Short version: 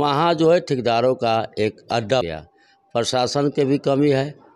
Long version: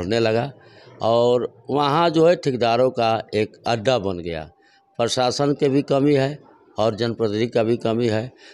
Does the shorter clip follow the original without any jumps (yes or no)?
no